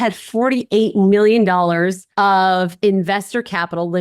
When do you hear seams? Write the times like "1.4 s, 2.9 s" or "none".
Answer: 2.0 s